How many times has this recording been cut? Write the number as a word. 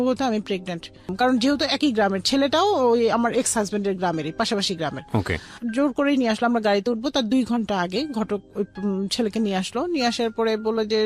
one